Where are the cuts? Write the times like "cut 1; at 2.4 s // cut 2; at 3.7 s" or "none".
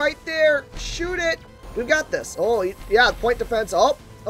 cut 1; at 1.6 s